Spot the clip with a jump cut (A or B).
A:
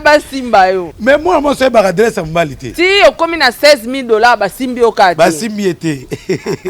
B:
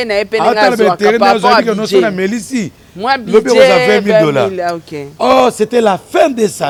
A